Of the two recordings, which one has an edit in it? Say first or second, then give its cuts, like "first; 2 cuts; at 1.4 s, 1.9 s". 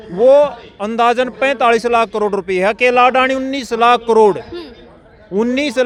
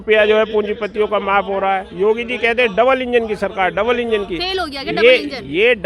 second; 1 cut; at 1.9 s